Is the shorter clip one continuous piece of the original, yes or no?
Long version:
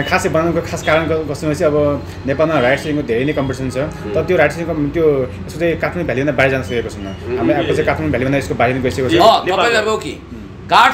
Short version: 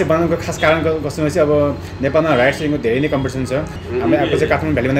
no